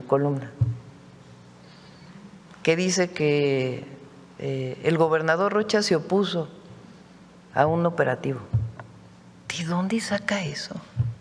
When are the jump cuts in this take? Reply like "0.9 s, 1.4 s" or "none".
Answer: none